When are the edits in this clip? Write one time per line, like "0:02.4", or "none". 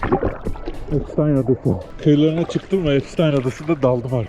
0:01.9